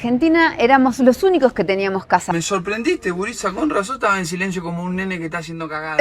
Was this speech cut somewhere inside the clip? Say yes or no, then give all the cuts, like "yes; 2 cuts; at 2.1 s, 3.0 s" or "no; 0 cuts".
yes; 1 cut; at 2.3 s